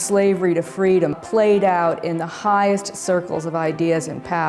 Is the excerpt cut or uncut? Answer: cut